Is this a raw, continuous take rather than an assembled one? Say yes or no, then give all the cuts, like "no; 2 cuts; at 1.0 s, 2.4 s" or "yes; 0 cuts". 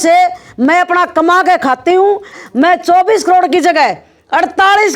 no; 1 cut; at 2.3 s